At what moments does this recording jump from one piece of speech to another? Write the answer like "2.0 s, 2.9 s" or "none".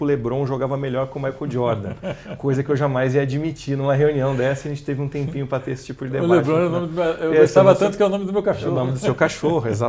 none

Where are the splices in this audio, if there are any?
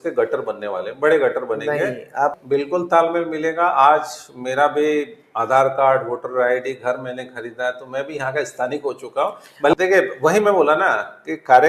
2.4 s, 9.7 s

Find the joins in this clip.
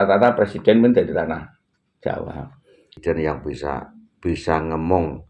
3.0 s

